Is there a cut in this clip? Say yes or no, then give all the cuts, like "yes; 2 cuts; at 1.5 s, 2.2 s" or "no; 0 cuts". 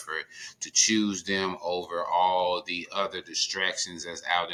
no; 0 cuts